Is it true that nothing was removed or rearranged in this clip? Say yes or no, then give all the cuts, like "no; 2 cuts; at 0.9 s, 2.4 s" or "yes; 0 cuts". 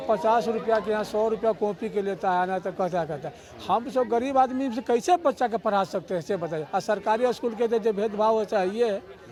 yes; 0 cuts